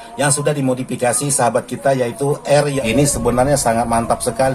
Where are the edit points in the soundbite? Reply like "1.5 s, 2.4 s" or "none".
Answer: 2.7 s